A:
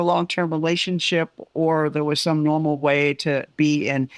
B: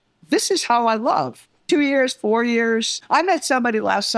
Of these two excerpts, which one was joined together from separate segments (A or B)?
B